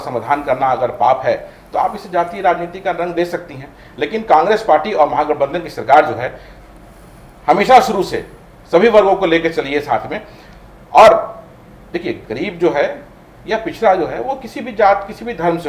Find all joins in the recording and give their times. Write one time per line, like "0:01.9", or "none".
none

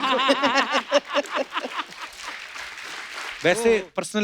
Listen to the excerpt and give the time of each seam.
0:03.3

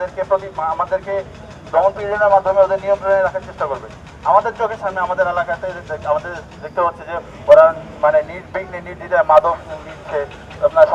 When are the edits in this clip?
none

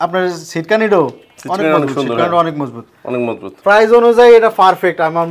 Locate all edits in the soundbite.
0:03.5

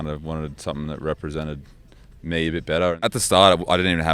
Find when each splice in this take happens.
0:03.0

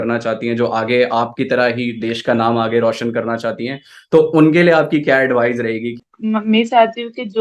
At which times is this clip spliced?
0:06.0

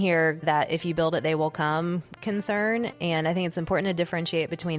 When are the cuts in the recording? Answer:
none

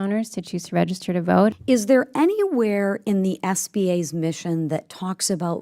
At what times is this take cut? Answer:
0:01.5

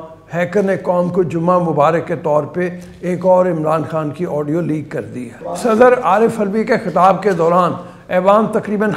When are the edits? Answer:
0:05.4

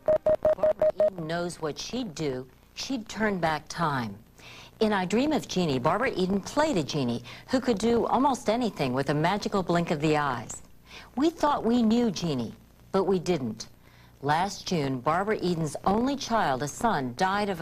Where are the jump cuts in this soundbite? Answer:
0:01.1
0:11.1

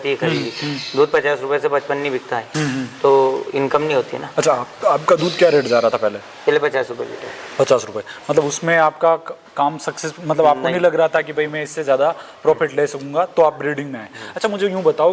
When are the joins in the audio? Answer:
none

